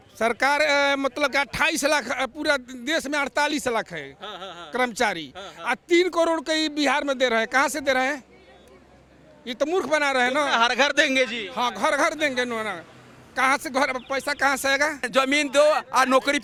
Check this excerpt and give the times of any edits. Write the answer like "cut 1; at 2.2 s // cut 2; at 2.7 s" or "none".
none